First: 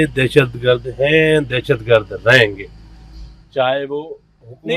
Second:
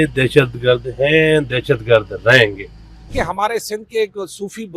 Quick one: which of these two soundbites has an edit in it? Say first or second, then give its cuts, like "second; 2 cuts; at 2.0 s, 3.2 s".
second; 1 cut; at 3.1 s